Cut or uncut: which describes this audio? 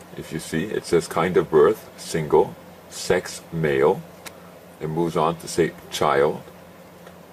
uncut